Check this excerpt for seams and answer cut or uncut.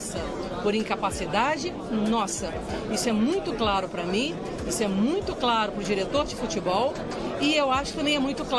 uncut